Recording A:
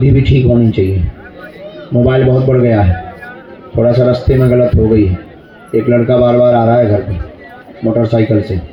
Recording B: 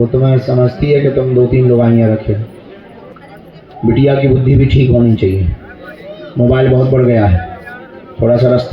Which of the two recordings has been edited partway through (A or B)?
B